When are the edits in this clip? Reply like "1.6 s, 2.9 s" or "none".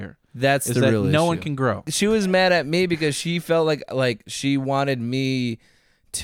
1.9 s